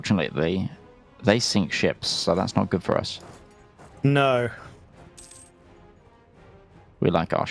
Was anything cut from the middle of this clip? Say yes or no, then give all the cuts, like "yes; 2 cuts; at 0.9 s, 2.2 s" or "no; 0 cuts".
no; 0 cuts